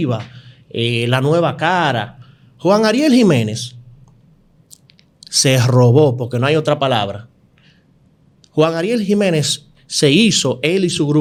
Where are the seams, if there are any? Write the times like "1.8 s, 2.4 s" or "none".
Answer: none